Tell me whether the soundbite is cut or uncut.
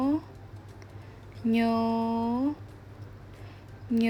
uncut